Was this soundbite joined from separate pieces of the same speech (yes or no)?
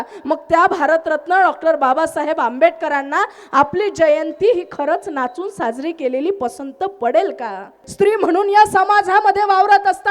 yes